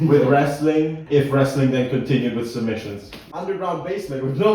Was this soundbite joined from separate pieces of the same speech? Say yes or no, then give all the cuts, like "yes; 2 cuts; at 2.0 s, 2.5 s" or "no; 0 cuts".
yes; 2 cuts; at 1.0 s, 3.2 s